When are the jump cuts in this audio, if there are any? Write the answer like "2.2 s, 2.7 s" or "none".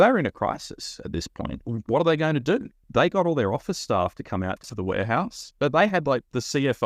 1.6 s, 2.8 s, 4.7 s